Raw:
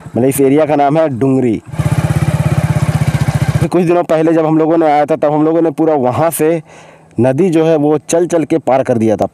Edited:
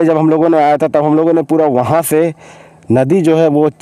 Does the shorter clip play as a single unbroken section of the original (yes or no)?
yes